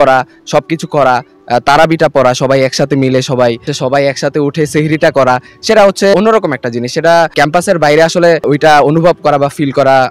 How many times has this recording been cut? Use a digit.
4